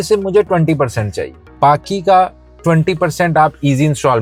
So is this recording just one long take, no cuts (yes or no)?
yes